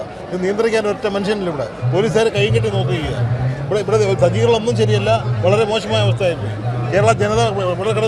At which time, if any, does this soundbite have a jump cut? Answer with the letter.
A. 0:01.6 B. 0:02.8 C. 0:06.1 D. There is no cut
D